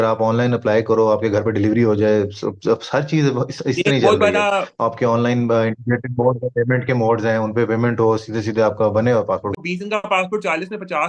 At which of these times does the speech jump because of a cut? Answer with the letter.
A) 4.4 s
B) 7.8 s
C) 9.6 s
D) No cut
C